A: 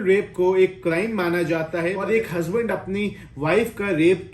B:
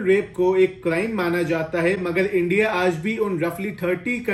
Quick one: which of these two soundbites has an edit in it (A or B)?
A